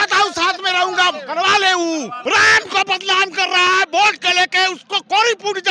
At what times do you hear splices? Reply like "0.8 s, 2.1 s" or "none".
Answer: 2.1 s